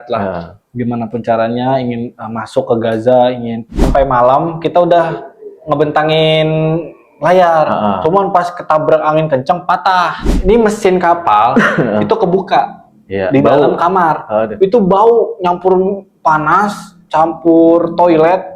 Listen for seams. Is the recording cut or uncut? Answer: cut